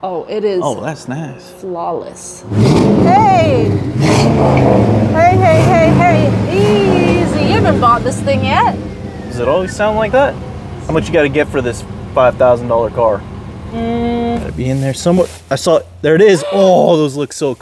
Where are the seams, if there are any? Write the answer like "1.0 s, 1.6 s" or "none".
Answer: 2.5 s, 10.8 s, 14.5 s